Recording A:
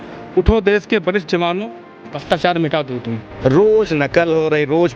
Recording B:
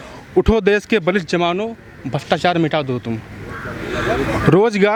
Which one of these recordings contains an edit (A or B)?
A